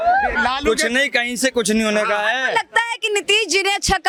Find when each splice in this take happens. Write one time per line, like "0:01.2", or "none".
none